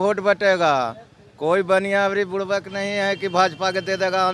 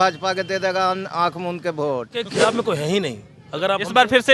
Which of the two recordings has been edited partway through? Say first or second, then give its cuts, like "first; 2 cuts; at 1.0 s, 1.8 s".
second; 1 cut; at 2.3 s